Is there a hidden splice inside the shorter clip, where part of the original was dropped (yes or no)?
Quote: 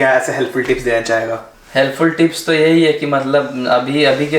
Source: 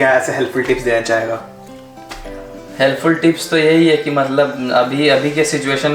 yes